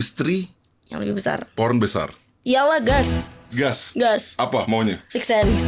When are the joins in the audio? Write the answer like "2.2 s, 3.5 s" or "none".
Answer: none